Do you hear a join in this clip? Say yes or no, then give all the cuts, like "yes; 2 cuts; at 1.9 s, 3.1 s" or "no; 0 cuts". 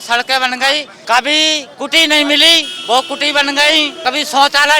yes; 3 cuts; at 0.9 s, 2.7 s, 3.9 s